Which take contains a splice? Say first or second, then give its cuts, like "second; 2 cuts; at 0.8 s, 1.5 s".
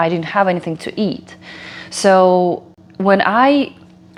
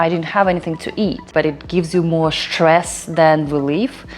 second; 1 cut; at 1.3 s